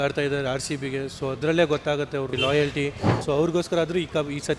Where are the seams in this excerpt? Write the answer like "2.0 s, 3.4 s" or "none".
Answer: 3.2 s